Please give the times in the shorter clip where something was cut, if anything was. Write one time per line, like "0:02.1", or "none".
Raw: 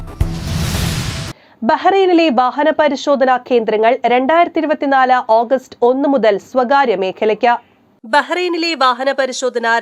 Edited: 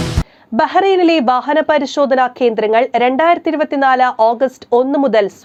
none